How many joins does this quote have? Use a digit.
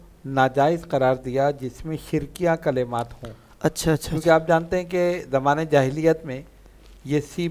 0